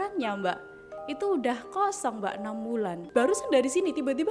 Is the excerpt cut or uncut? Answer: cut